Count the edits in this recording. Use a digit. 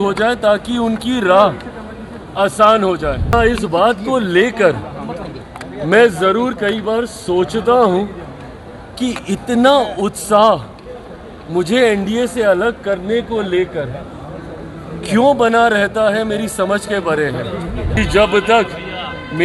2